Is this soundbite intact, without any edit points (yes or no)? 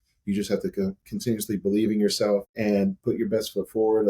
no